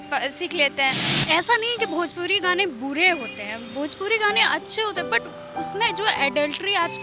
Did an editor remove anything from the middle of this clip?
yes; 1 cut; at 1.1 s

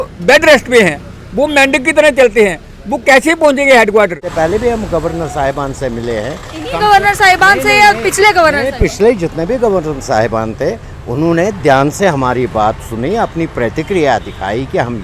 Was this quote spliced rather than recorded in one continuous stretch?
yes; 1 cut; at 4.2 s

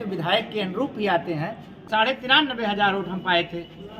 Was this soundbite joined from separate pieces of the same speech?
yes; 1 cut; at 1.8 s

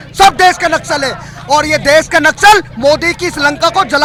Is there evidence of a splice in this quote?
no; 0 cuts

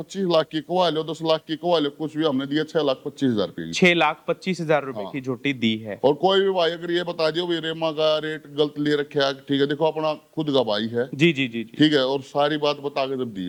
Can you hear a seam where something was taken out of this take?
no; 0 cuts

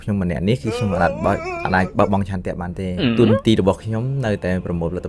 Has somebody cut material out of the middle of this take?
no; 0 cuts

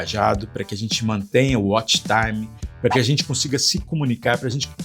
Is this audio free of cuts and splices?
yes; 0 cuts

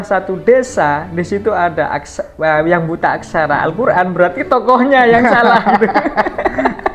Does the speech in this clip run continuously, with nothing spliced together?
yes; 0 cuts

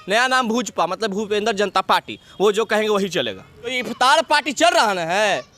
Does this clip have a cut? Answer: yes; 1 cut; at 3.8 s

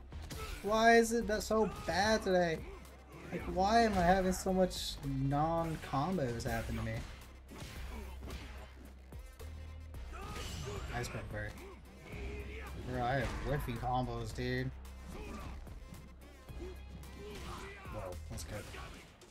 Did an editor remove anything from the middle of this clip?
no; 0 cuts

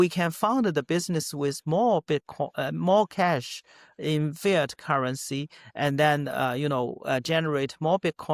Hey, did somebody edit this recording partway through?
no; 0 cuts

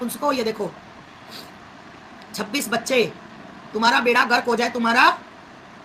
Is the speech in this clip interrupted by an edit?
no; 0 cuts

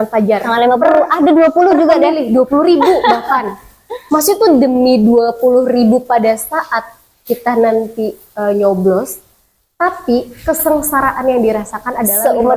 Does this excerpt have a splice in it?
no; 0 cuts

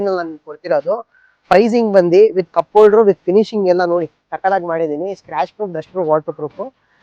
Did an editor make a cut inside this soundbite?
no; 0 cuts

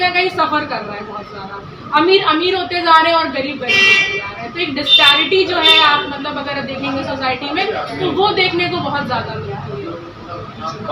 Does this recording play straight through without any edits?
yes; 0 cuts

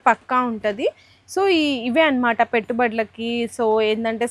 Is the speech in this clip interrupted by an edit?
no; 0 cuts

